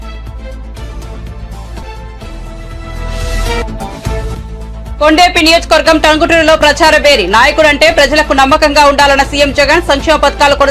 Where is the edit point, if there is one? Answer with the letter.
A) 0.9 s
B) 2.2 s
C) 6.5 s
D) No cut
A